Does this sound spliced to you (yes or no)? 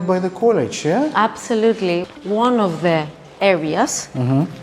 yes